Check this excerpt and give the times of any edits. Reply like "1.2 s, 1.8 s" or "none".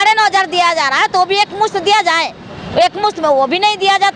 none